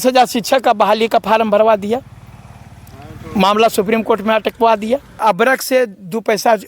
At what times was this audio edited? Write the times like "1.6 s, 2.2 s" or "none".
5.2 s